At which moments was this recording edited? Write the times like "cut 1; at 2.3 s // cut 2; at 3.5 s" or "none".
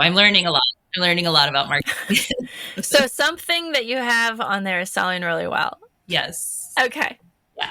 cut 1; at 5.9 s

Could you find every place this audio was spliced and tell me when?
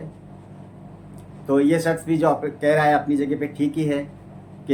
none

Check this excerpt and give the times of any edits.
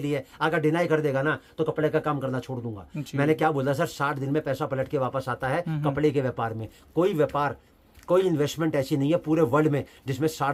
none

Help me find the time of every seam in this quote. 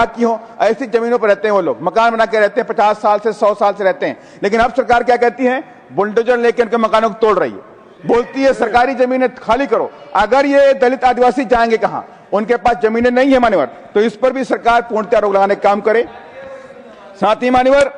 none

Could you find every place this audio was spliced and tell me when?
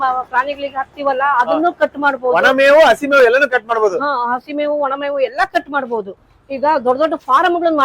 cut 1; at 6.1 s

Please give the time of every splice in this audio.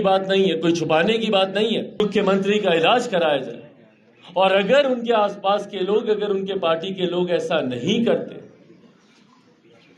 cut 1; at 2.0 s

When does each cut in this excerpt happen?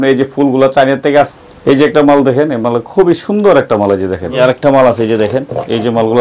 cut 1; at 1.3 s // cut 2; at 4.3 s

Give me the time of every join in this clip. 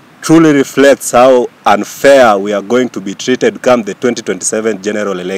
none

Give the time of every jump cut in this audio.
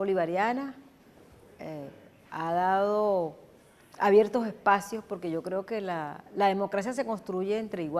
cut 1; at 2.6 s

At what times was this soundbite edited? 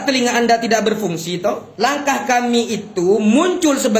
cut 1; at 1.7 s

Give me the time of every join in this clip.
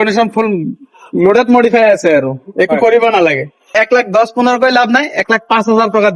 cut 1; at 3.7 s

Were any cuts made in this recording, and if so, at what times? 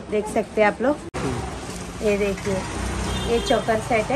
cut 1; at 1.6 s

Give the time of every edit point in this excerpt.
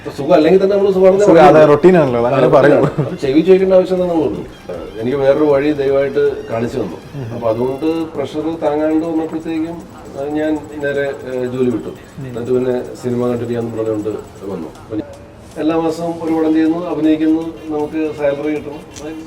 cut 1; at 4.6 s // cut 2; at 15.0 s

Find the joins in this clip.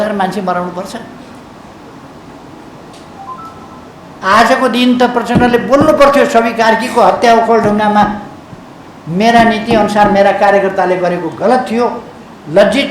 cut 1; at 3.9 s

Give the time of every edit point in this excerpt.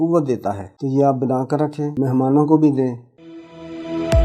cut 1; at 1.9 s // cut 2; at 3.1 s

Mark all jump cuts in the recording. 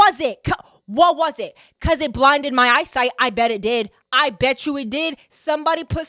none

